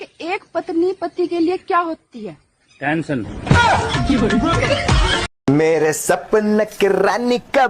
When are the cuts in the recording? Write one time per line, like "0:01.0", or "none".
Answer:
0:05.3